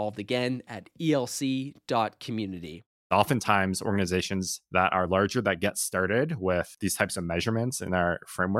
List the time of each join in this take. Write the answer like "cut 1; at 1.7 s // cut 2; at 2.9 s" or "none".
cut 1; at 3.1 s

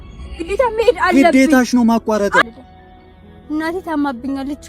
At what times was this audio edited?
cut 1; at 2.4 s

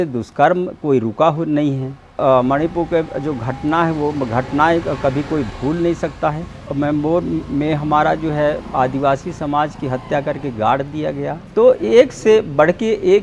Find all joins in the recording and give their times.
cut 1; at 2.2 s // cut 2; at 6.7 s // cut 3; at 11.4 s

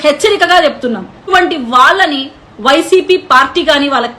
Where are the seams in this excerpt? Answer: cut 1; at 1.3 s

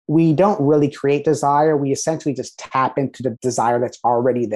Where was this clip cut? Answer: cut 1; at 3.4 s

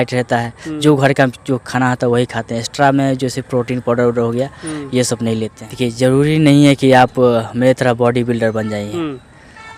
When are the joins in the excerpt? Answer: cut 1; at 5.6 s

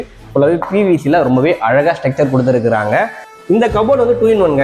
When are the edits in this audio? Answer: cut 1; at 3.2 s

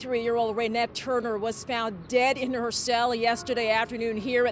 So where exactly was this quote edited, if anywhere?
none

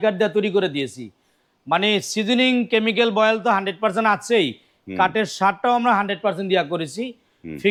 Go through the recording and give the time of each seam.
none

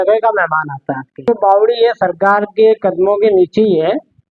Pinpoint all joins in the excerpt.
cut 1; at 1.3 s

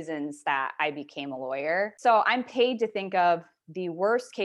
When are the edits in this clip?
cut 1; at 1.9 s

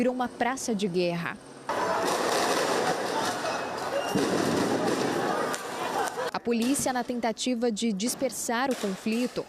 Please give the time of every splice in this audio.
cut 1; at 1.5 s // cut 2; at 6.3 s

